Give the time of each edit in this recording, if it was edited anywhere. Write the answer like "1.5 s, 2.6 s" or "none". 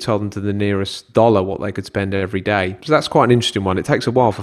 1.0 s, 2.8 s